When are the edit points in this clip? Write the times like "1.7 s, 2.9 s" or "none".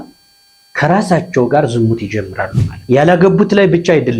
2.8 s